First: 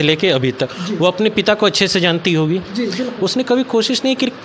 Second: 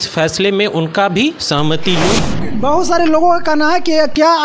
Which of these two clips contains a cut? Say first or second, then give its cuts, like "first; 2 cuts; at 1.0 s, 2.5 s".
second; 1 cut; at 2.4 s